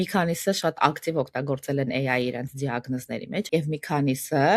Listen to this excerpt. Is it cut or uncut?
cut